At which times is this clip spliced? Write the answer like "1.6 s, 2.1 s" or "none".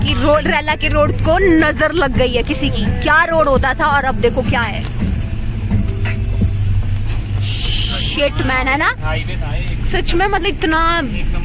none